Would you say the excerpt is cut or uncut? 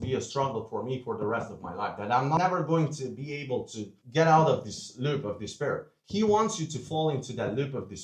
cut